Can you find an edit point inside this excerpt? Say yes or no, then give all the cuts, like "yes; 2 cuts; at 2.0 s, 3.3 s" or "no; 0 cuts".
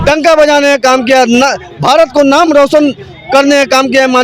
no; 0 cuts